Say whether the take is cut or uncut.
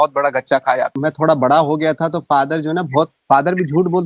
cut